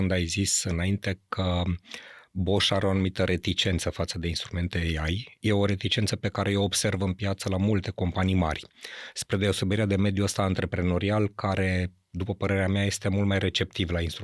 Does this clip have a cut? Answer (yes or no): no